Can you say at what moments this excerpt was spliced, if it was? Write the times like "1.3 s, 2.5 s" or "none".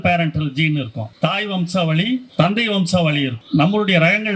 1.0 s, 2.3 s, 3.4 s

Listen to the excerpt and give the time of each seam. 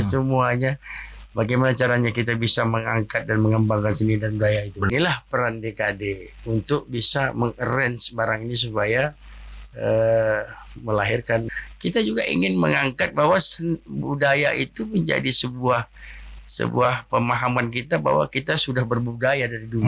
4.9 s, 11.6 s

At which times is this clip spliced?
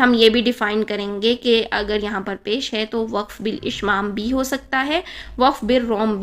none

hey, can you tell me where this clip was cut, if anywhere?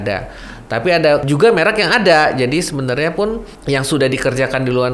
1.2 s, 3.5 s

